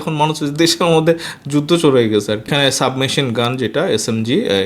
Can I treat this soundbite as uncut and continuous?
no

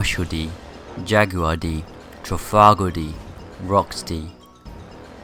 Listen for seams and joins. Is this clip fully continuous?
yes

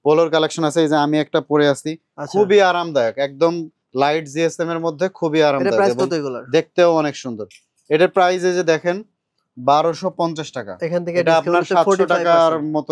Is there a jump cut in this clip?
no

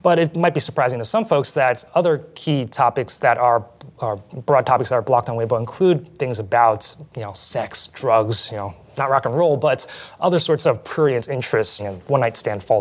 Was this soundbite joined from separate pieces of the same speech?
yes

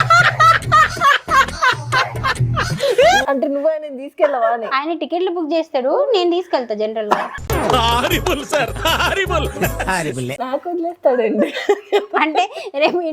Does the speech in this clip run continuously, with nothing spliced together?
no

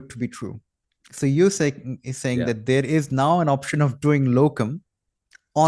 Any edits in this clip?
no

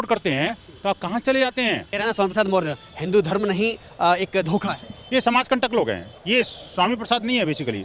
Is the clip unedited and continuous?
no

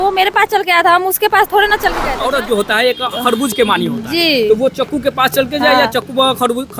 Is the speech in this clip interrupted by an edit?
yes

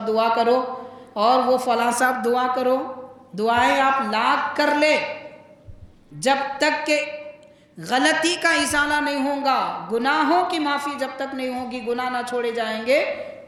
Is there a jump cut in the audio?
no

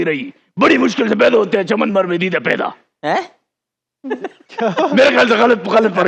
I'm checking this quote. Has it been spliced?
no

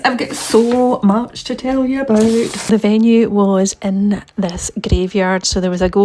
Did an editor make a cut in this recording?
yes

